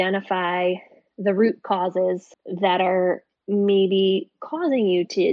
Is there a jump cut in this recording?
no; 0 cuts

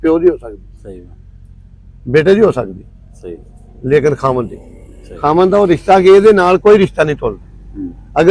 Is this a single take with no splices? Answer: yes; 0 cuts

